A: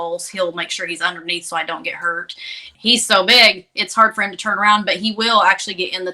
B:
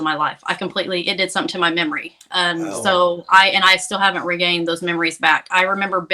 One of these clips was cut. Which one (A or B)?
A